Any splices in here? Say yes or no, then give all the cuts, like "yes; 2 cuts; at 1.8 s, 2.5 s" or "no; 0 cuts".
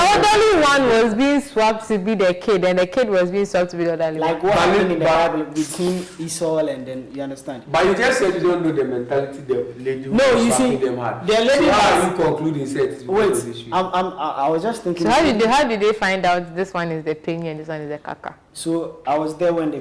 no; 0 cuts